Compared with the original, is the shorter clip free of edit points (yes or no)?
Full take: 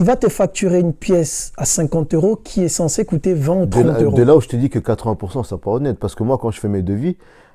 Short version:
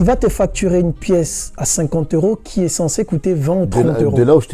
yes